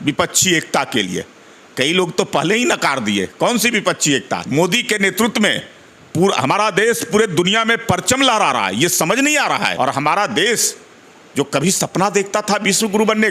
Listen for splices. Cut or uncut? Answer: cut